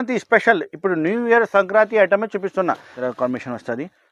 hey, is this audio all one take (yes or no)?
no